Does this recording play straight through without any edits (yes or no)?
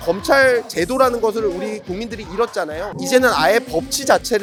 yes